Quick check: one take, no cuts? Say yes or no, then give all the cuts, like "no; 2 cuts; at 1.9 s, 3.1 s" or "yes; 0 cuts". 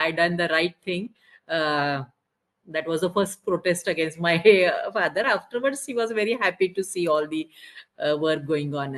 yes; 0 cuts